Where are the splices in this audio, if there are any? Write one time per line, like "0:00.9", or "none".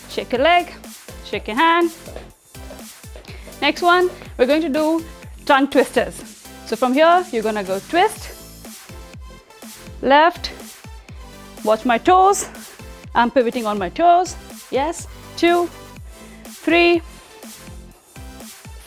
none